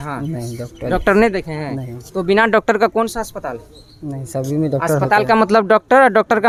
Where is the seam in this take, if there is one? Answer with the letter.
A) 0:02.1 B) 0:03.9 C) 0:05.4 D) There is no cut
D